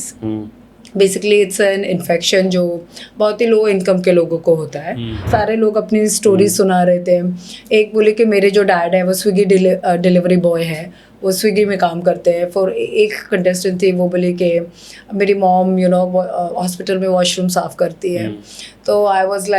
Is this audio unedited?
no; 1 cut; at 5.2 s

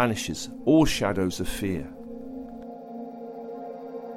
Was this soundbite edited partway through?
yes; 1 cut; at 1.8 s

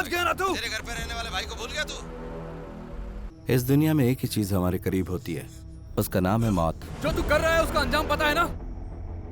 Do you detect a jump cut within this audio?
yes; 3 cuts; at 3.3 s, 6.9 s, 8.5 s

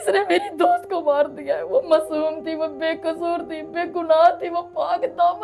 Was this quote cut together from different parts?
no; 0 cuts

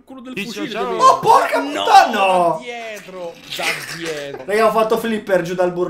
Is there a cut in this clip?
no; 0 cuts

